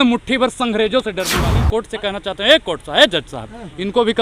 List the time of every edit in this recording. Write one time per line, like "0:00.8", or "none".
0:01.4